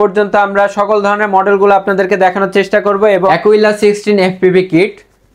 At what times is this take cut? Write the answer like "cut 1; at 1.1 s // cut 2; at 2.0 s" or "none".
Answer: cut 1; at 3.3 s